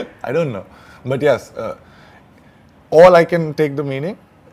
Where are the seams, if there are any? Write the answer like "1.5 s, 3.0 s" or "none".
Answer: none